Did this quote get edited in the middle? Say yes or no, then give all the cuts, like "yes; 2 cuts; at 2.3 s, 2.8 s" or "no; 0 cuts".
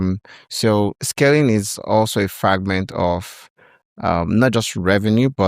yes; 1 cut; at 1.0 s